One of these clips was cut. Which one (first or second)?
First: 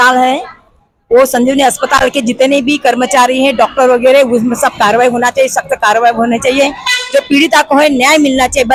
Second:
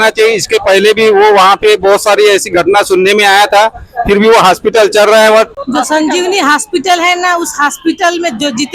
second